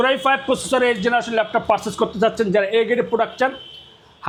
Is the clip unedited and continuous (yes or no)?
yes